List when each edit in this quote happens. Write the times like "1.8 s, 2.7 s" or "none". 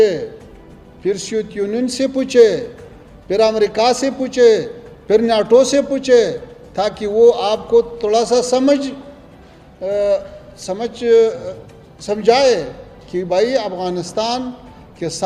none

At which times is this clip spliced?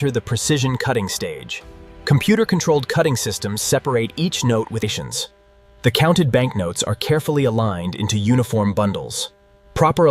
4.9 s

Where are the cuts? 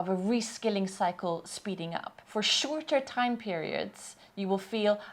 2.1 s

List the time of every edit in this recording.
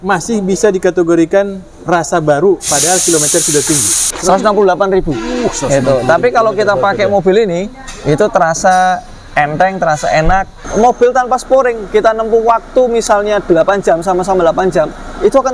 4.0 s, 10.6 s

